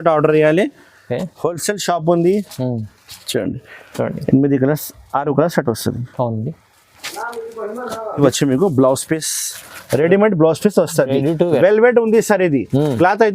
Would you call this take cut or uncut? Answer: cut